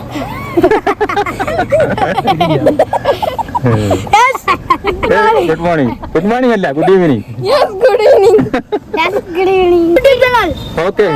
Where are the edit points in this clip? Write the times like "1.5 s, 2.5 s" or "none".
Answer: 10.0 s